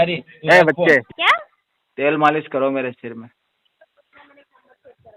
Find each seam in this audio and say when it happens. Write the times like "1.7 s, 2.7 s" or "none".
1.1 s